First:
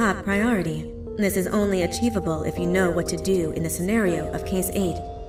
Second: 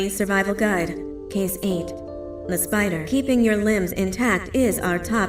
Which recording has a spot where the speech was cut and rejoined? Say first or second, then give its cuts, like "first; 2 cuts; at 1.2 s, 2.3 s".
second; 1 cut; at 0.9 s